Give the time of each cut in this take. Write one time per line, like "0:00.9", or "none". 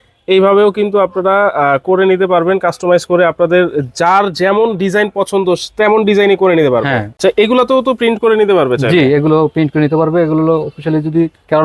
0:07.1